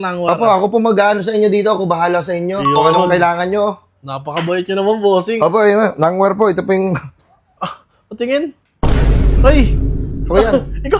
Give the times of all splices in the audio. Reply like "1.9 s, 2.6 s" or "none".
none